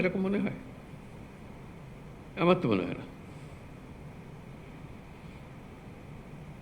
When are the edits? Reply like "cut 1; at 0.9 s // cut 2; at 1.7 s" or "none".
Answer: none